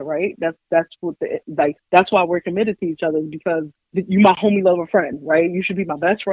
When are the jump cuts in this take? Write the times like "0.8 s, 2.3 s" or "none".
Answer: 1.8 s, 3.8 s